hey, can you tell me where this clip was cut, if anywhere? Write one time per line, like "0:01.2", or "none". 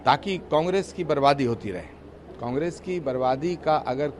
none